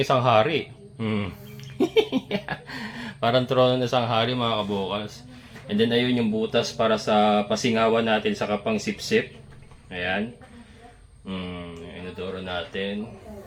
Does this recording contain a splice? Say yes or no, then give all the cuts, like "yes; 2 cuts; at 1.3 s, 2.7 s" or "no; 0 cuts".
no; 0 cuts